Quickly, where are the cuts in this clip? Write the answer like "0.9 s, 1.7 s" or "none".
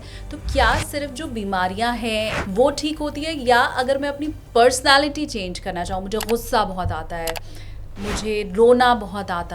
2.4 s